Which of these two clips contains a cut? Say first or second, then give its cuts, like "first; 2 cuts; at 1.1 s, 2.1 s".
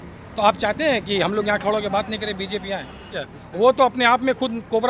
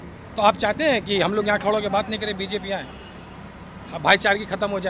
first; 1 cut; at 3.2 s